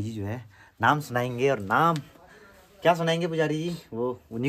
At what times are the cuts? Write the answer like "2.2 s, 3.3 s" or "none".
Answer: none